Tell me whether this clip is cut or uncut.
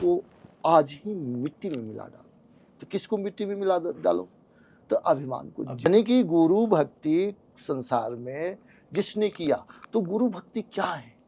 cut